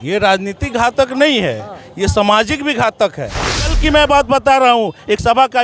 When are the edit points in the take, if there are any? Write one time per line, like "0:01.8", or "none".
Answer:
0:03.7